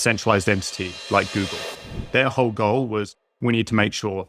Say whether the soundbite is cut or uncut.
cut